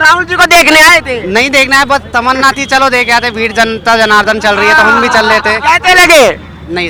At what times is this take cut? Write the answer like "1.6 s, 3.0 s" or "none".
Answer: none